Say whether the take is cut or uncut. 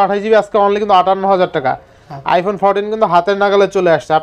uncut